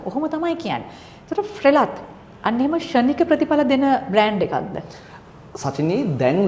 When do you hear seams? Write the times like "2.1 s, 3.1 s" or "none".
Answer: none